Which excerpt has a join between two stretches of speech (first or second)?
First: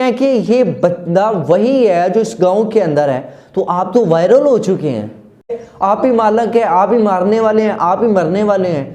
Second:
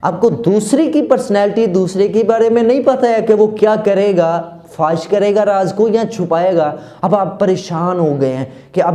first